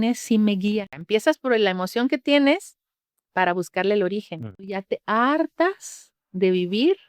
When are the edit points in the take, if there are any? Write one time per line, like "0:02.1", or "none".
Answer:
0:00.9
0:04.6